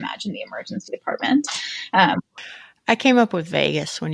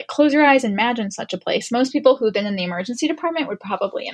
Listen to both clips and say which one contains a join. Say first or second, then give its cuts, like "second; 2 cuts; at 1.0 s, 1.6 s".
first; 1 cut; at 2.5 s